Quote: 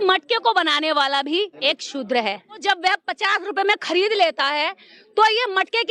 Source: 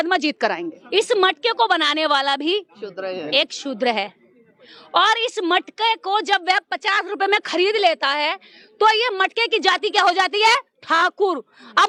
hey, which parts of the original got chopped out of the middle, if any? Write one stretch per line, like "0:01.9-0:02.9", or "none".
0:02.7-0:03.3
0:04.3-0:06.2